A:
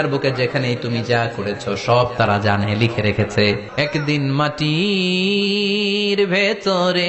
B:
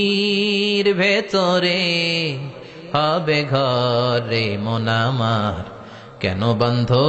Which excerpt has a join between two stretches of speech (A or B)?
A